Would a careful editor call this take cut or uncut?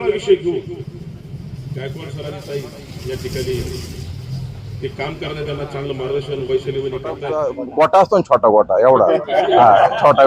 cut